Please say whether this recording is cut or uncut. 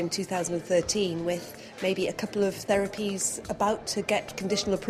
uncut